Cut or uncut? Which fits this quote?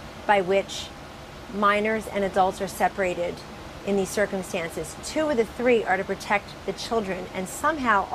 uncut